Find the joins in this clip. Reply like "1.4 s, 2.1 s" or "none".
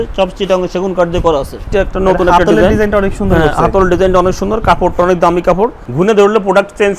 1.6 s, 5.8 s